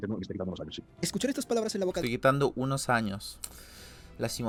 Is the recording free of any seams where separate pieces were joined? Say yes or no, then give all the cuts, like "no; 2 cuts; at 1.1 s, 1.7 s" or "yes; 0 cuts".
yes; 0 cuts